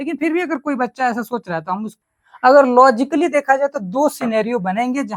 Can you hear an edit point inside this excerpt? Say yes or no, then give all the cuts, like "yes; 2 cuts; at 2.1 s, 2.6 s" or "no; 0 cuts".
yes; 1 cut; at 2.0 s